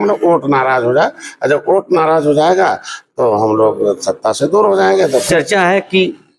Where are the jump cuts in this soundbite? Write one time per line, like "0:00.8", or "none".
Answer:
0:05.3